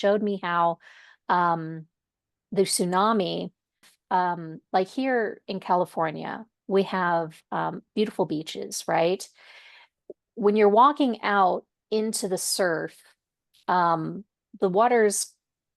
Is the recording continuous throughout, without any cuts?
no; 1 cut; at 3.8 s

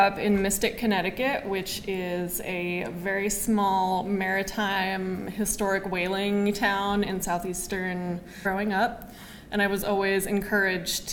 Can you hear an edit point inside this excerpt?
no; 0 cuts

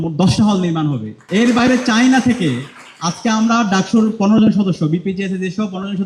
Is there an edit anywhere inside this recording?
yes; 1 cut; at 1.1 s

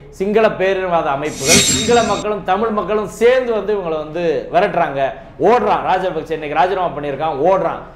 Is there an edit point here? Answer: yes; 1 cut; at 1.7 s

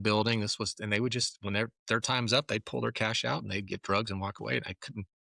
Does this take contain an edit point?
no; 0 cuts

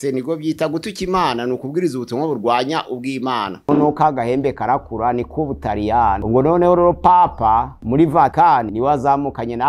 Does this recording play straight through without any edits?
no; 3 cuts; at 3.7 s, 6.2 s, 8.5 s

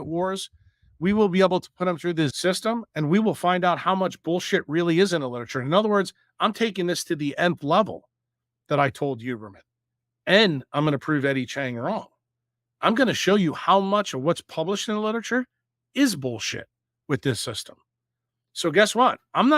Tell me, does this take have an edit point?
yes; 1 cut; at 2.3 s

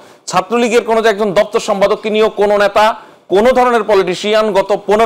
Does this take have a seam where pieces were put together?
no; 0 cuts

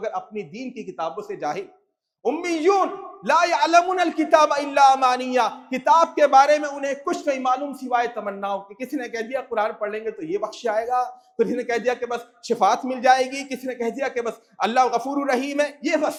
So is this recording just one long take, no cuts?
yes; 0 cuts

